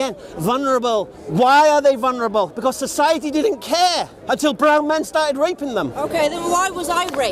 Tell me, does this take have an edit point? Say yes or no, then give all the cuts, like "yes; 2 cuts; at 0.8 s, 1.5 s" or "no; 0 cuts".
no; 0 cuts